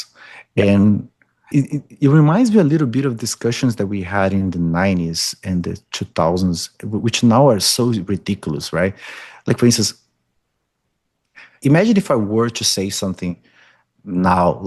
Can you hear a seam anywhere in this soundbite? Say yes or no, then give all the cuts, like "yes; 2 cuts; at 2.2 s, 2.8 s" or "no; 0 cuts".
yes; 2 cuts; at 1.5 s, 11.6 s